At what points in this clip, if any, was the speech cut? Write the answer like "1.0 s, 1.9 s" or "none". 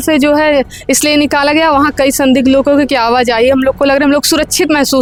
none

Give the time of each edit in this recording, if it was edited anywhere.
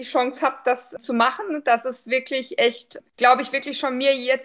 0.9 s, 2.9 s

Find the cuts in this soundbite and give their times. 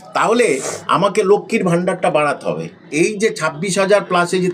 2.9 s

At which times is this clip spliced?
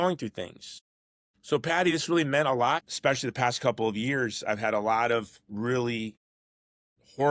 2.9 s

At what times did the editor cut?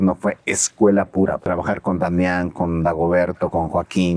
1.4 s

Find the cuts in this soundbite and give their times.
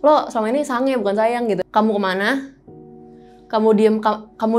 1.7 s

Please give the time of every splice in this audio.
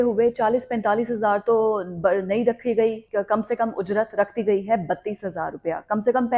3.0 s

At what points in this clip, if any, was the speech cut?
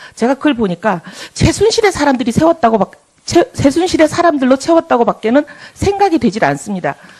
none

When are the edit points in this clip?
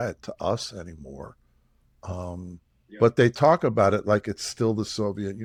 none

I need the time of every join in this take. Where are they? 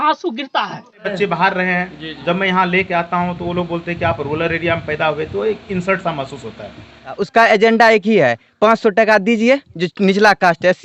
1.1 s, 7.1 s

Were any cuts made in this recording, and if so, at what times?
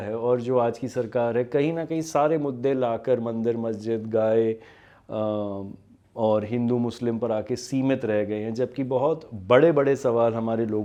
none

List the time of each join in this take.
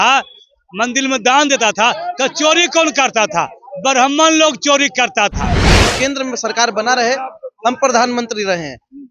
5.8 s

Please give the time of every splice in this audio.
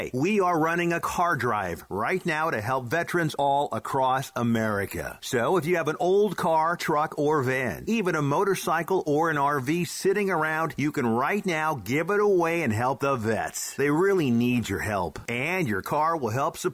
none

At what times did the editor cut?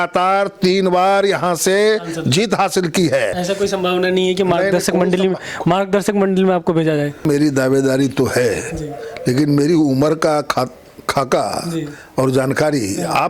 3.3 s, 7.2 s

